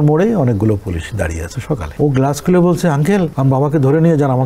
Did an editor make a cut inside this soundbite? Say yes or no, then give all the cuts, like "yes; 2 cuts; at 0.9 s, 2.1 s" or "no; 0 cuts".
yes; 2 cuts; at 1.9 s, 3.3 s